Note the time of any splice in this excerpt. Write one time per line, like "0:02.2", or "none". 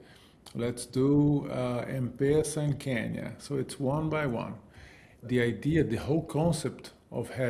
0:05.2